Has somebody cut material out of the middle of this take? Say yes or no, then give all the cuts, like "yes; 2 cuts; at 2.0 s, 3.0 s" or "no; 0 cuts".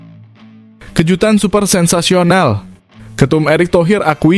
yes; 1 cut; at 0.9 s